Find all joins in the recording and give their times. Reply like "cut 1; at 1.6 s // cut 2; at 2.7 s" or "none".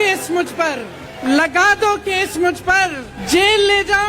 cut 1; at 1.2 s // cut 2; at 3.1 s